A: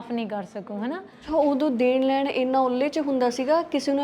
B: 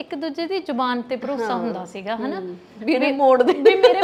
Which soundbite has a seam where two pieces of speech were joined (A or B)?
A